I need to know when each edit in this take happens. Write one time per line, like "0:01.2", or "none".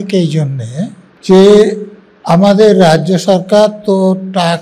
0:01.1

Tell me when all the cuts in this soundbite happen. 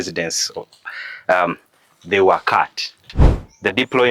0:03.1

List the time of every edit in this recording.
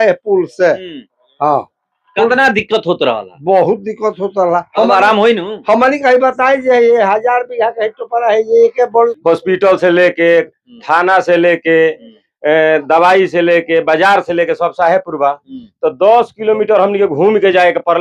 0:09.2

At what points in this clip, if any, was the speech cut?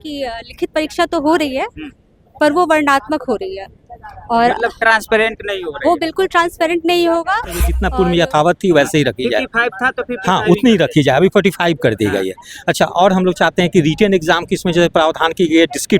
0:07.8

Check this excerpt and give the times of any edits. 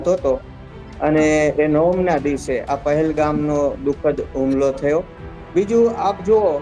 none

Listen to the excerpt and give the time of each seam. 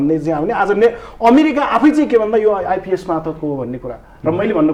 none

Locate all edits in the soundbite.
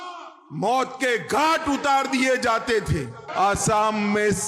0:03.2

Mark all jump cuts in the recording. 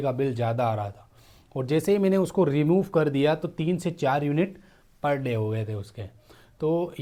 none

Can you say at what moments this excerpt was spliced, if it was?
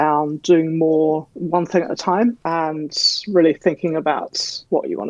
none

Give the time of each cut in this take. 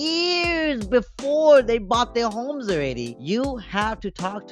0:03.1

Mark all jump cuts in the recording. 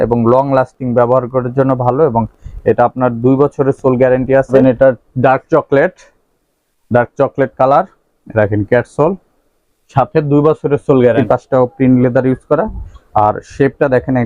0:04.5
0:11.2

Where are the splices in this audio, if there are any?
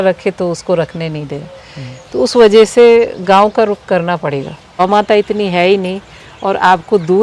0:04.8

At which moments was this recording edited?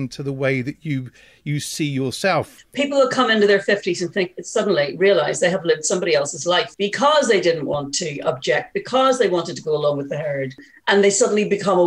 0:02.6
0:06.7
0:10.7

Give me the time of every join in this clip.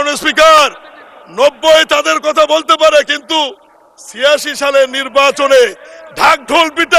none

